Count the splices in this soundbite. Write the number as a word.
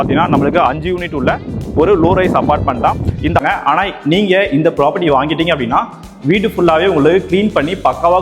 one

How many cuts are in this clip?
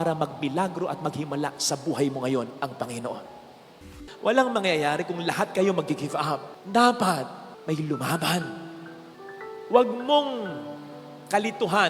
one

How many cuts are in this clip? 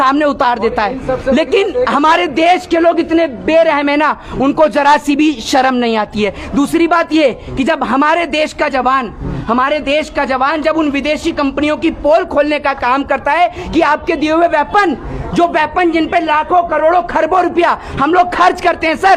zero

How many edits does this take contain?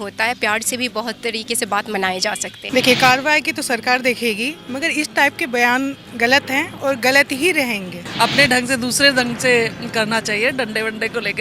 two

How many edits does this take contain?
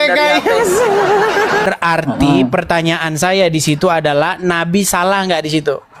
one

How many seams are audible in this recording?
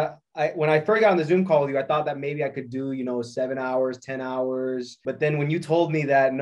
one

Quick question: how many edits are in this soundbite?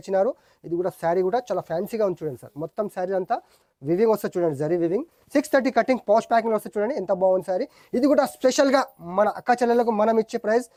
zero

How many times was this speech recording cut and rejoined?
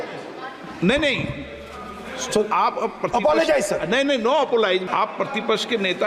one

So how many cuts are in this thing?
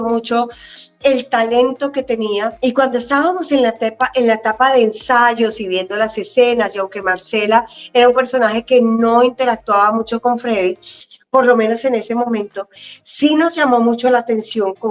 zero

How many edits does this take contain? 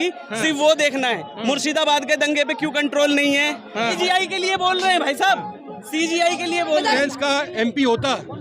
two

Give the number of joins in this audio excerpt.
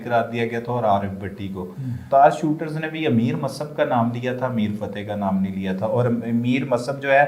one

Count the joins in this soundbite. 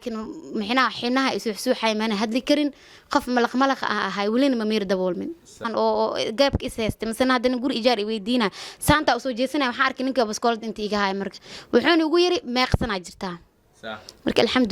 one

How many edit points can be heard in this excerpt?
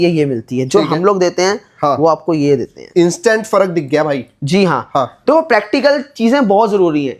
zero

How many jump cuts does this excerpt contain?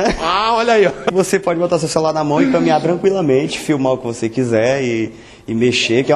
one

